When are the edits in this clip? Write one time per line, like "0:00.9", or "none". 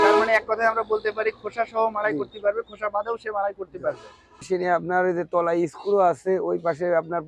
0:04.5